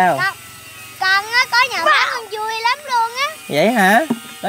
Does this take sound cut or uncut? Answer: uncut